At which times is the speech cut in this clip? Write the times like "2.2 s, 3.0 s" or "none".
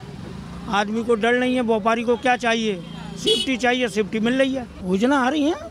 4.7 s